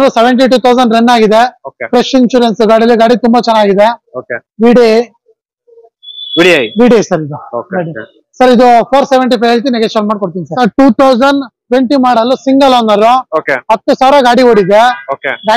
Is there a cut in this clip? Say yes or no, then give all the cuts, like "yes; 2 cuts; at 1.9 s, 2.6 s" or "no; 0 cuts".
yes; 1 cut; at 10.4 s